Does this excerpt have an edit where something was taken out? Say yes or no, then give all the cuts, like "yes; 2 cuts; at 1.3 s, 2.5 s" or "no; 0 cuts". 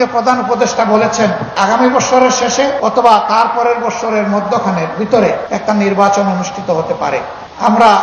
yes; 3 cuts; at 1.5 s, 2.7 s, 5.5 s